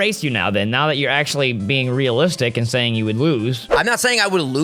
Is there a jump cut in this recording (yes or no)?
yes